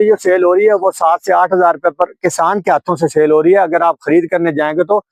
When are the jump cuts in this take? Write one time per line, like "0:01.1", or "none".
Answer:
none